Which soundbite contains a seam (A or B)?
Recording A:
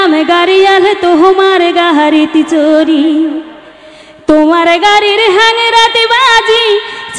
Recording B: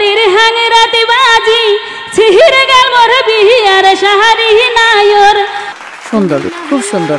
B